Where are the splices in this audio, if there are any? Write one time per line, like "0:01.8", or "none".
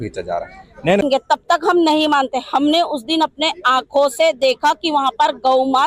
0:01.0